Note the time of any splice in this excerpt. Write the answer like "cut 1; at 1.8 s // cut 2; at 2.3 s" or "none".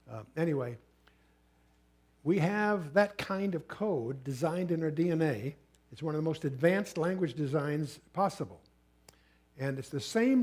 cut 1; at 4.7 s